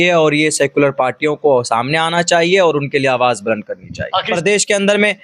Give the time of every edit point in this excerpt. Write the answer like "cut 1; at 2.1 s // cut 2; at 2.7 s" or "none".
cut 1; at 4.3 s